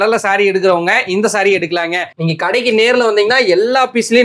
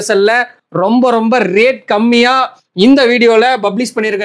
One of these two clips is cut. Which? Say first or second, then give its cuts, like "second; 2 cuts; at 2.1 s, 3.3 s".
first; 1 cut; at 2.1 s